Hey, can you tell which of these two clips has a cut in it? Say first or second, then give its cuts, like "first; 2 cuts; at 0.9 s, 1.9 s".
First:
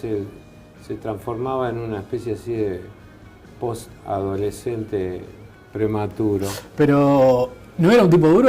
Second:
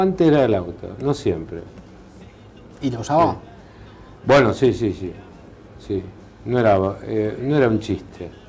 first; 1 cut; at 6.5 s